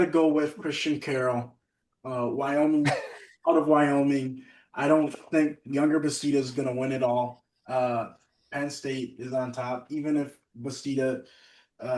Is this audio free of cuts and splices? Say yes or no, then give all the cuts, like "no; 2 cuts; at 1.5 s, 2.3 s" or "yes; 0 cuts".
yes; 0 cuts